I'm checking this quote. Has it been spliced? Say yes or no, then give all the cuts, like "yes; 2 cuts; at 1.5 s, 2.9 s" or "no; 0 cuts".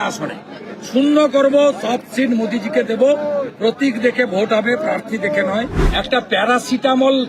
yes; 1 cut; at 5.8 s